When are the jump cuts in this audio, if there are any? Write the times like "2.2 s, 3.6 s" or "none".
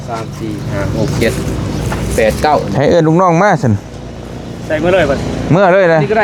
none